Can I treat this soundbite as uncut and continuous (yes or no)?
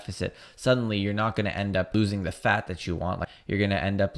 no